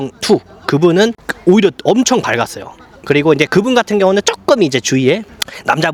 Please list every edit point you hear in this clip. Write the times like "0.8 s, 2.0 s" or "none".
none